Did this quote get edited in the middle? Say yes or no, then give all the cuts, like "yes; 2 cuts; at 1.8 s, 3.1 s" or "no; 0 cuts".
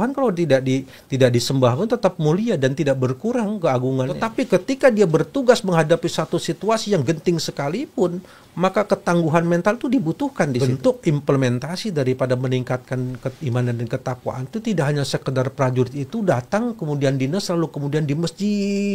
yes; 2 cuts; at 4.2 s, 10.7 s